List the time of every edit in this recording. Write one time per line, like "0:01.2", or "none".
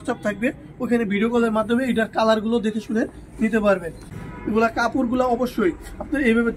0:04.1